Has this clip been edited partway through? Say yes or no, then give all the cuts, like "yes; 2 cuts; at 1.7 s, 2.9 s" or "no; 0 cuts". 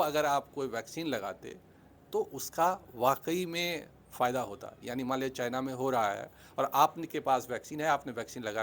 no; 0 cuts